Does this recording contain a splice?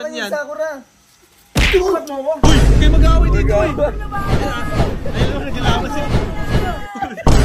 no; 0 cuts

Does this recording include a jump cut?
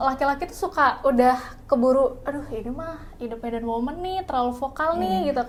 no; 0 cuts

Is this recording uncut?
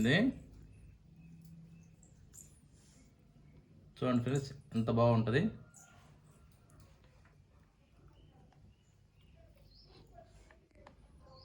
yes; 0 cuts

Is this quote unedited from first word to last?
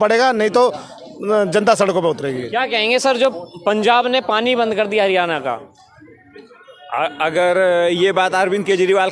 yes; 0 cuts

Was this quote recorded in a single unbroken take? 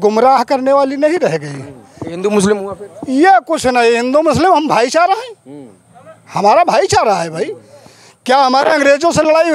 yes; 0 cuts

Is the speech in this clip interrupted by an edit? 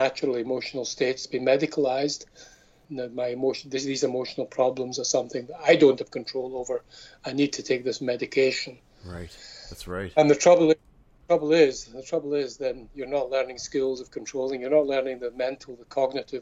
yes; 1 cut; at 2.9 s

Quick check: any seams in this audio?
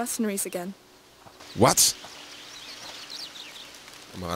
yes; 1 cut; at 3.0 s

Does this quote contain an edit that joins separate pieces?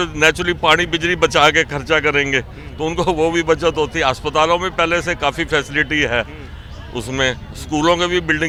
no; 0 cuts

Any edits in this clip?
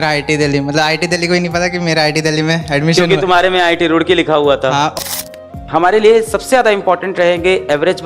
yes; 1 cut; at 5.0 s

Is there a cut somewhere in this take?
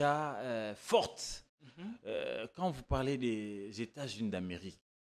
no; 0 cuts

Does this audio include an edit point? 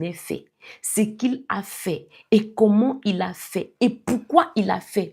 no; 0 cuts

